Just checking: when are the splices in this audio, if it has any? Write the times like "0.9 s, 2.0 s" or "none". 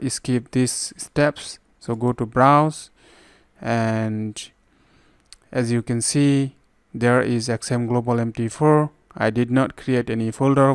none